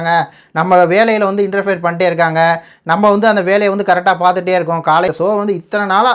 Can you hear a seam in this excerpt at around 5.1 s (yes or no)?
yes